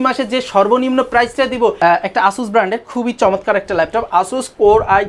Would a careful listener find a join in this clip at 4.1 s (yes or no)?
no